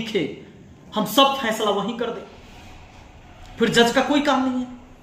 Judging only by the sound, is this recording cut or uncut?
uncut